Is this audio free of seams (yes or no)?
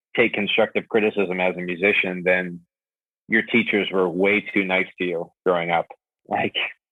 yes